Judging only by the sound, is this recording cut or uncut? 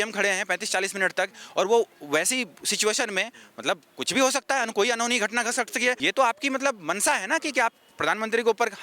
cut